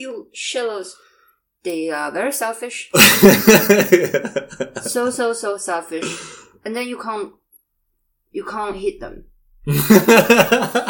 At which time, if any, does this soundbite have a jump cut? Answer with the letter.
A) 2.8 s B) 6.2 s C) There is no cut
C